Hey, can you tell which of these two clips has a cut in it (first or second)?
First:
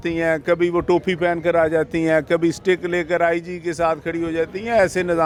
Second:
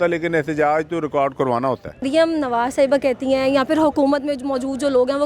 second